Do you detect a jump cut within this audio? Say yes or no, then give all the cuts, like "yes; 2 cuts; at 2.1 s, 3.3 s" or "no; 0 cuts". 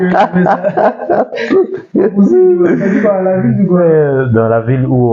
no; 0 cuts